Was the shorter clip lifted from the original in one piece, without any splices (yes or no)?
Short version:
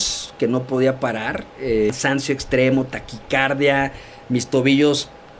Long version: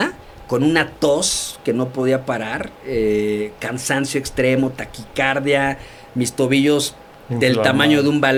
no